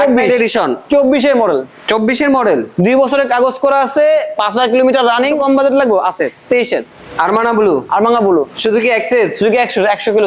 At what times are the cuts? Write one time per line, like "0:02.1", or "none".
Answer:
0:05.3
0:08.5